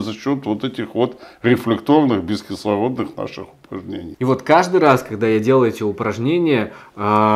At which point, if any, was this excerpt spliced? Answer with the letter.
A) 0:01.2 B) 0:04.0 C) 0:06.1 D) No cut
B